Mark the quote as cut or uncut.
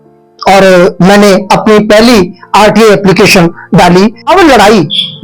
cut